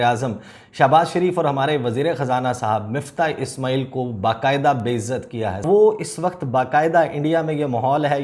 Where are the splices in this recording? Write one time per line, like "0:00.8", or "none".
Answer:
0:05.6